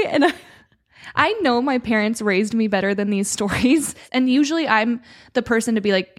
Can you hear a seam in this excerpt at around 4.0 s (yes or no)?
yes